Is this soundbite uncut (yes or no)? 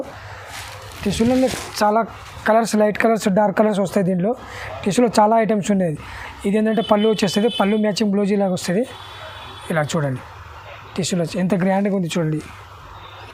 yes